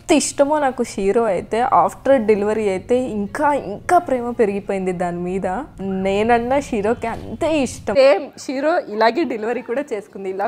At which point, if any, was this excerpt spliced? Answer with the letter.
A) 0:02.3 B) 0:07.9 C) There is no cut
B